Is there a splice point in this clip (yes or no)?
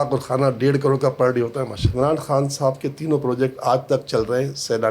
yes